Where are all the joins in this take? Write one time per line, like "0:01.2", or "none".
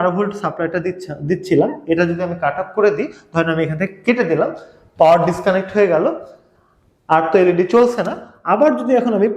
none